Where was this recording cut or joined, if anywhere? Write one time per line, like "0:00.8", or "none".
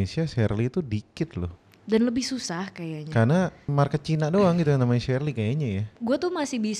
0:03.6
0:05.9